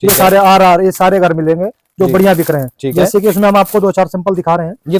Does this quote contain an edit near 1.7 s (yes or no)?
no